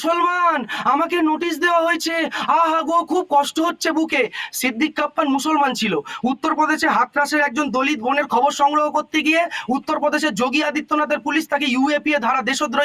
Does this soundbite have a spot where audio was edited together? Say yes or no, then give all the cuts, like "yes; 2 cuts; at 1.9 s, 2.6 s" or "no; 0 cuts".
no; 0 cuts